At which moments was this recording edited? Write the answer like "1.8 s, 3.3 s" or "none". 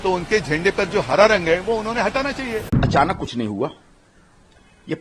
2.7 s